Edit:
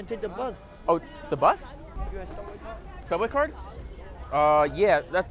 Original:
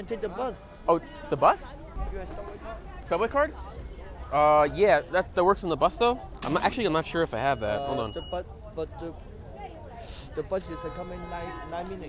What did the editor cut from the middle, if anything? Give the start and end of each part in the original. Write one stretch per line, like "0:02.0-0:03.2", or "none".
none